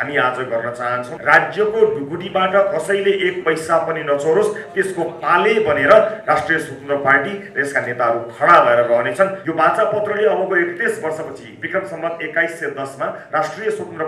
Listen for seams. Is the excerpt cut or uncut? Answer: cut